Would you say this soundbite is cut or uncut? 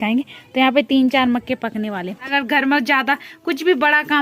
cut